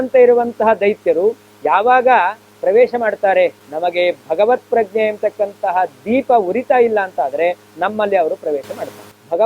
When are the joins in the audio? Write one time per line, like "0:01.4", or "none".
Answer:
0:03.7